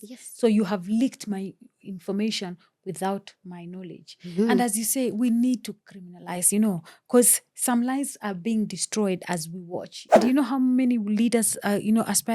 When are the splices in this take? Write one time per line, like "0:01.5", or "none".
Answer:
0:10.2